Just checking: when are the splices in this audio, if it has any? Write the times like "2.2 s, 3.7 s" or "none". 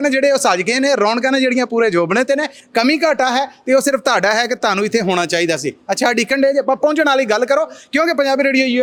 none